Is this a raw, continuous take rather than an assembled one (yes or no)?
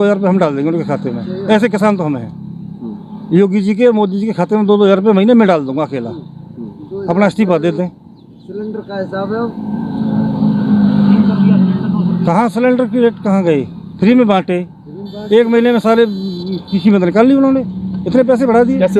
yes